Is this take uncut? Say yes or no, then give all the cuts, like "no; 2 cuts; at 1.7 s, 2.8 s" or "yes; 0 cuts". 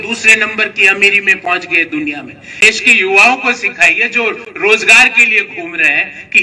no; 1 cut; at 2.6 s